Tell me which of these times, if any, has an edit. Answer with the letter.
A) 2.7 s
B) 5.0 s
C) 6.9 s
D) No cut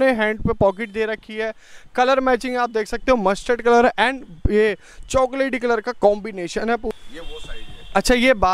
C